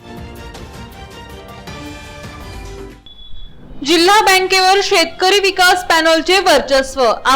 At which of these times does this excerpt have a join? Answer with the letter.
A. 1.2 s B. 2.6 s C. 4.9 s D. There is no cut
B